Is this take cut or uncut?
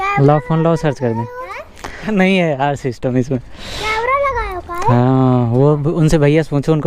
cut